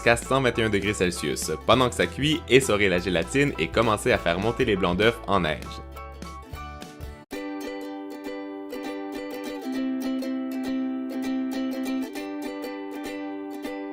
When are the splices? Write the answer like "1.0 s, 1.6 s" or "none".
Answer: none